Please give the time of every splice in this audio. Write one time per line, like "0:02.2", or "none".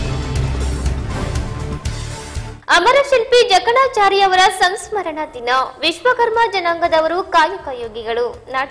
0:01.7